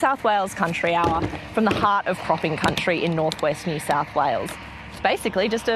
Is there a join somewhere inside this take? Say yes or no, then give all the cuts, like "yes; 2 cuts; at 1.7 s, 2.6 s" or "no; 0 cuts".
no; 0 cuts